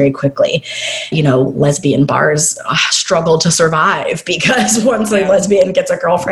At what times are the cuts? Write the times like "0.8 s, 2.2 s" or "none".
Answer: 1.1 s